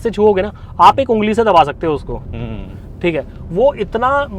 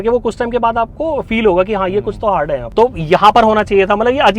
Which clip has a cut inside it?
second; 1 cut; at 2.6 s

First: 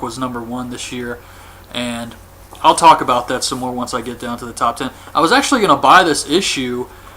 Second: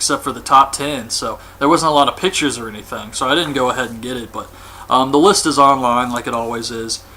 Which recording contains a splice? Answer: first; 1 cut; at 5.0 s

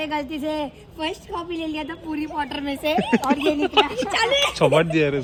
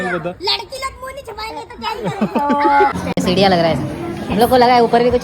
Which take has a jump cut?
second; 1 cut; at 2.9 s

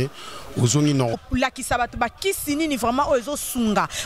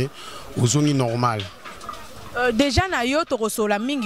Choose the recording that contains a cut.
first; 1 cut; at 1.2 s

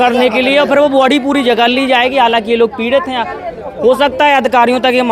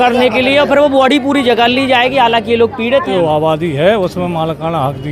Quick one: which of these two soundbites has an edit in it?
second; 1 cut; at 3.1 s

